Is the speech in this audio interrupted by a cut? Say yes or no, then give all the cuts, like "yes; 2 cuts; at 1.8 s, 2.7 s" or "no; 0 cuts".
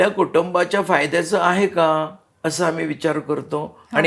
no; 0 cuts